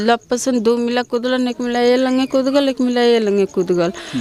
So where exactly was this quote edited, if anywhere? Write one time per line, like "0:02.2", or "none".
none